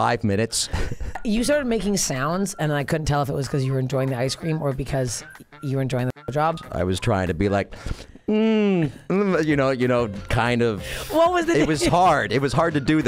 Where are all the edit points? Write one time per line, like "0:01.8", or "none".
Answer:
0:01.2
0:06.6